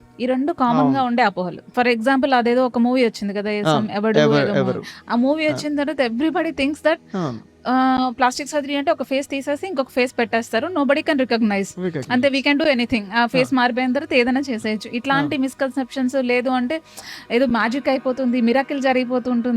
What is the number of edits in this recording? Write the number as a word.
one